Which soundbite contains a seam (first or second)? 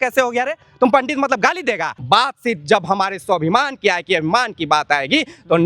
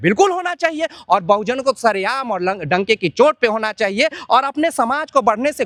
first